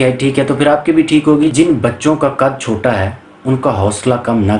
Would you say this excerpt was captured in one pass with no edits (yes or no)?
no